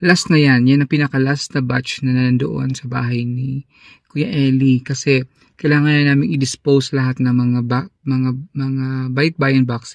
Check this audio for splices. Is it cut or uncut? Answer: uncut